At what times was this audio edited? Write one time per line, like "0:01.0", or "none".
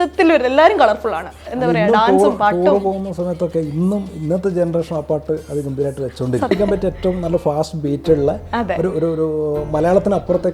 0:01.5
0:06.5